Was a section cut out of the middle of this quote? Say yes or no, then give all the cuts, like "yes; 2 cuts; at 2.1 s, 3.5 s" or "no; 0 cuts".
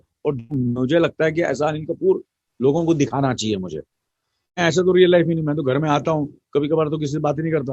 no; 0 cuts